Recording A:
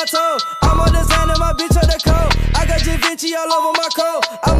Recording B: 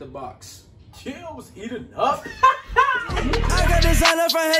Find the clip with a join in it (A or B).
B